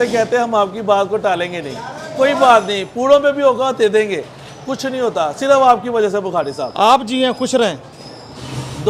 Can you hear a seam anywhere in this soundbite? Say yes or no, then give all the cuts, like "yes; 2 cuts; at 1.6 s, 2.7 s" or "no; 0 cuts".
no; 0 cuts